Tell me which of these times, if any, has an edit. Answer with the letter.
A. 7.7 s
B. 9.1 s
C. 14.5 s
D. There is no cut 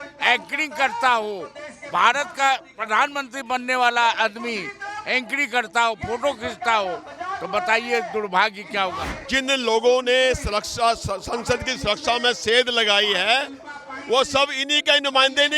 B